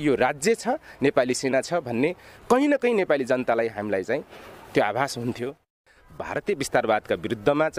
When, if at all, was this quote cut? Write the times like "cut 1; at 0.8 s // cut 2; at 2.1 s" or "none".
cut 1; at 5.6 s